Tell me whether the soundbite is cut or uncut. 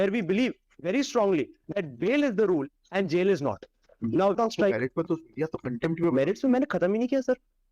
cut